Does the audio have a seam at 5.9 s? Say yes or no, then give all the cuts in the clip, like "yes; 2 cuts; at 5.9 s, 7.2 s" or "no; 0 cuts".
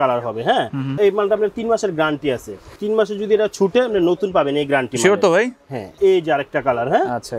yes; 3 cuts; at 1.0 s, 2.7 s, 5.9 s